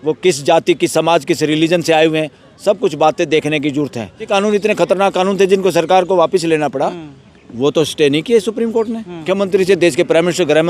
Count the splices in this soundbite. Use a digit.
2